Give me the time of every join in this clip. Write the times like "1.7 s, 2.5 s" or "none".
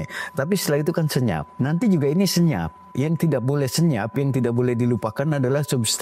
1.5 s